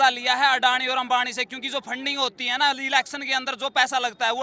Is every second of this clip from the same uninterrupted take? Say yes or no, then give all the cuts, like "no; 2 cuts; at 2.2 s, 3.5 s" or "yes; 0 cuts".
yes; 0 cuts